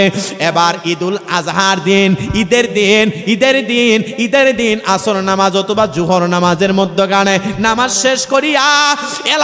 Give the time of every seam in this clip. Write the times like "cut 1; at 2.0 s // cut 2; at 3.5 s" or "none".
none